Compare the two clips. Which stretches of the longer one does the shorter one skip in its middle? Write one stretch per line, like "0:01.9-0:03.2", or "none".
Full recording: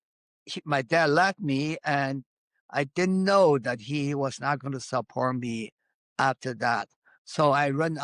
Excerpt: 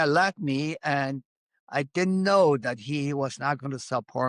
none